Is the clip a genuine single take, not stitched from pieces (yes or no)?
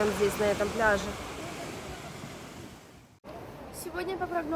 yes